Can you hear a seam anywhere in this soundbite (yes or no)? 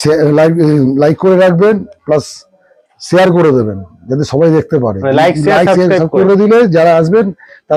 no